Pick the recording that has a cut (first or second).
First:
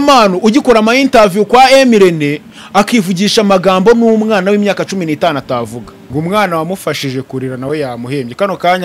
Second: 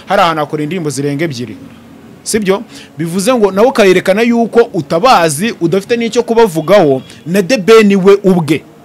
first